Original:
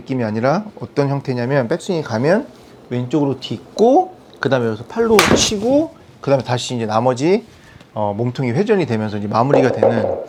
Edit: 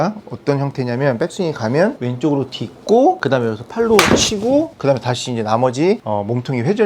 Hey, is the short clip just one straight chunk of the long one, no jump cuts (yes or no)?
no